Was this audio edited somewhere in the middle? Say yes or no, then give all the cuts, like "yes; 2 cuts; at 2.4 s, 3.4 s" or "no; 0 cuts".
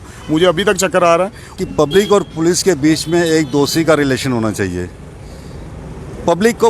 yes; 1 cut; at 1.4 s